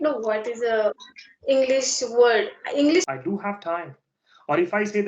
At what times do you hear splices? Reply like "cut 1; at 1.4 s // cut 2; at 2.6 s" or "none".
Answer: cut 1; at 3.1 s